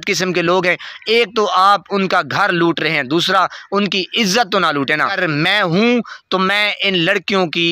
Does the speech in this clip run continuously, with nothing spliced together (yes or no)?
no